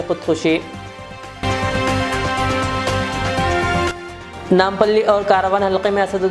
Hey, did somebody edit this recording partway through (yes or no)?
no